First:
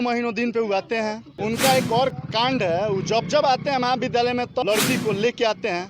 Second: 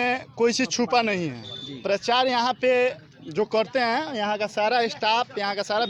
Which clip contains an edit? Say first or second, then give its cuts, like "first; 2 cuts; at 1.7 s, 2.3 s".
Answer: first; 2 cuts; at 1.3 s, 4.6 s